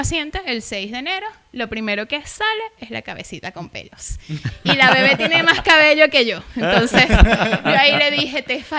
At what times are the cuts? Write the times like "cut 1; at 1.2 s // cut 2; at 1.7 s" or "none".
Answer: none